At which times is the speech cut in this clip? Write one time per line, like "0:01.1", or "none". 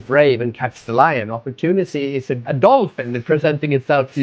0:02.5